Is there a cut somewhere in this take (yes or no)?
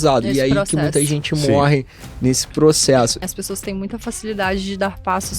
yes